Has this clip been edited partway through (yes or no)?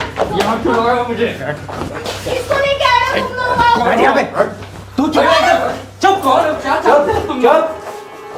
no